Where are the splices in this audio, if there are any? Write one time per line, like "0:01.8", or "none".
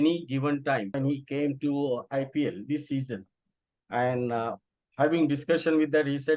0:01.0